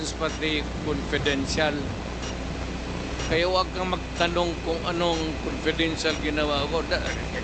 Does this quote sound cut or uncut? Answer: uncut